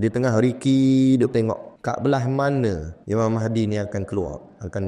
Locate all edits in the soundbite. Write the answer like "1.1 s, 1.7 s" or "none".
1.7 s, 2.9 s